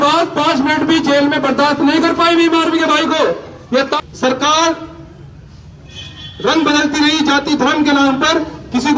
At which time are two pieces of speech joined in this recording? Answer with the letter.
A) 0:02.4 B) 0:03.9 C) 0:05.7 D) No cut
B